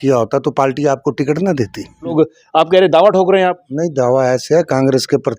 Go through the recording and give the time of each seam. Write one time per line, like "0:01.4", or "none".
0:02.1